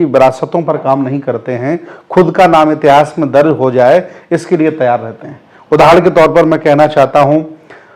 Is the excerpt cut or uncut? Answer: uncut